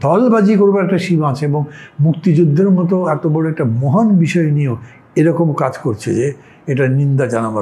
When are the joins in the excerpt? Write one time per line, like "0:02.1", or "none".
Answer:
none